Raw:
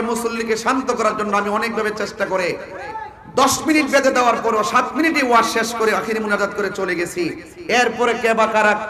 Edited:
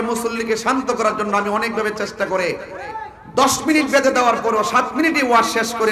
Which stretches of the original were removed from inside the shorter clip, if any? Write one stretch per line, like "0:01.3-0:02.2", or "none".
none